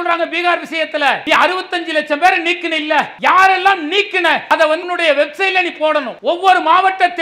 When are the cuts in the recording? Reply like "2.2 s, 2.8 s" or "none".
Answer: 1.2 s, 3.1 s, 4.6 s, 6.1 s